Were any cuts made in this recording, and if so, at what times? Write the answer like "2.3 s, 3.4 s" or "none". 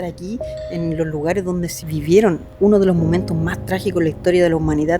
1.8 s